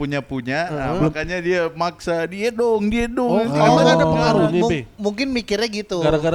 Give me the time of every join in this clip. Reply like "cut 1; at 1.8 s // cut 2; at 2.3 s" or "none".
none